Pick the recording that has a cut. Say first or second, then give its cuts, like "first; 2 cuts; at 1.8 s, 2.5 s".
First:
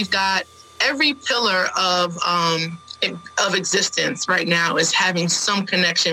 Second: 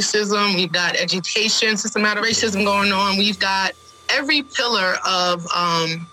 second; 1 cut; at 2.2 s